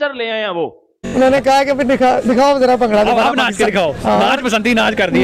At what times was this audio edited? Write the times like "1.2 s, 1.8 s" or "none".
1.1 s